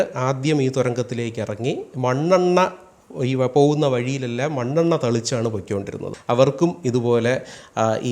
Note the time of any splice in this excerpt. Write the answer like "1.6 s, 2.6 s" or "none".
6.1 s